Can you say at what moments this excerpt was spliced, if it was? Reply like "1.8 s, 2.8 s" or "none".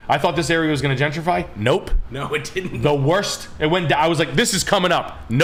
none